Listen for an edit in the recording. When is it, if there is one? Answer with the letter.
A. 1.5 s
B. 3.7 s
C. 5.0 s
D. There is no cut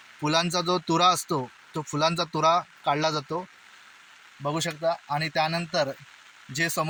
D